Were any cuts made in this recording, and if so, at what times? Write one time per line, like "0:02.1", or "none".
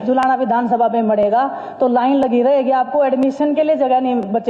none